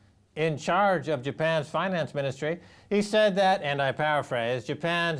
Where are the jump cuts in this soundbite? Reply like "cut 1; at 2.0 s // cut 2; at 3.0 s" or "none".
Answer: cut 1; at 3.9 s